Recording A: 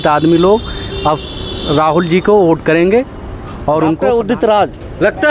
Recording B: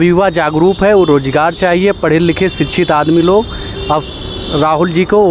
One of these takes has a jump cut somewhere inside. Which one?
A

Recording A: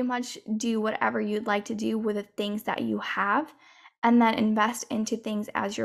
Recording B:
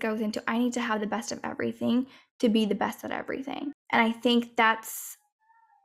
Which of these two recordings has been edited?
B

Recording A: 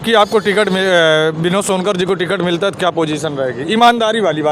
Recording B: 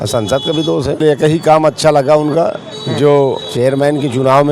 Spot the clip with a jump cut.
B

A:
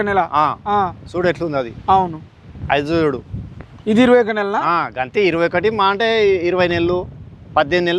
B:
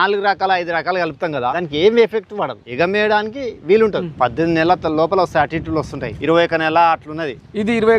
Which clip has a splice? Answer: B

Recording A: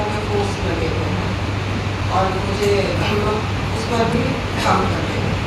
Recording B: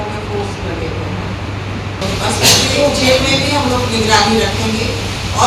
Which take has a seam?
B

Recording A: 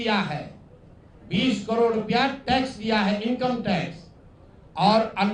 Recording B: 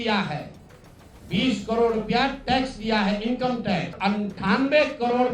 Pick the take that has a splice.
B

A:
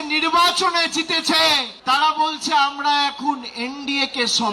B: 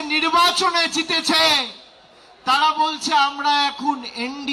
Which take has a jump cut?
A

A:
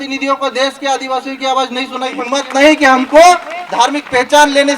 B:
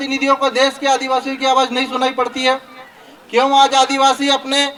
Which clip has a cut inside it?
A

